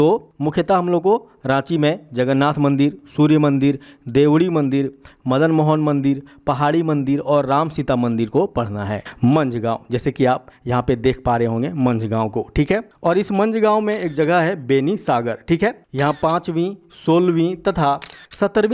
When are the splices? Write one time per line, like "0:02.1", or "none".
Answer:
0:09.0